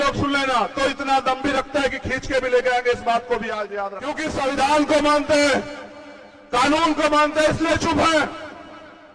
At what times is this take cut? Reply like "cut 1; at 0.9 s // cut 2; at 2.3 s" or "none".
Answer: cut 1; at 4.1 s

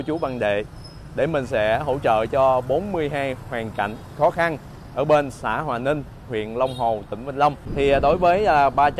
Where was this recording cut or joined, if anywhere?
cut 1; at 7.6 s

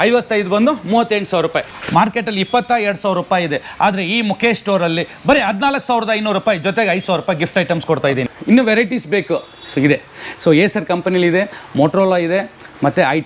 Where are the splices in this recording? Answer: cut 1; at 1.8 s // cut 2; at 8.2 s

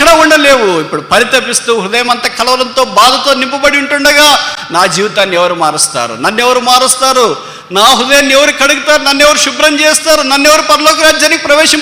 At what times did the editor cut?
none

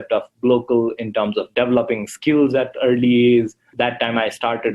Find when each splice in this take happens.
cut 1; at 3.7 s

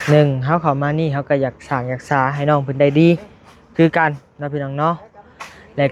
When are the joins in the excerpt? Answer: none

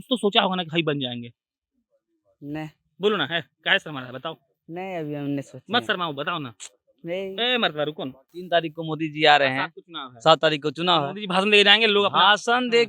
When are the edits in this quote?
cut 1; at 8.3 s

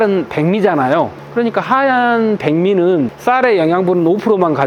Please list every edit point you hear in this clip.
none

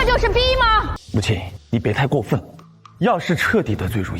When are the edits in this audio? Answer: cut 1; at 1.0 s

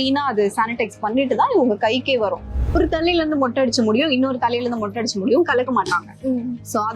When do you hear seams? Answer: cut 1; at 2.7 s

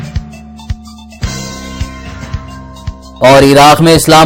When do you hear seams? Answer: cut 1; at 3.1 s

